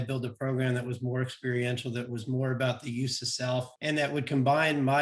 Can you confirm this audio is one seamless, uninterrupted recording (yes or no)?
no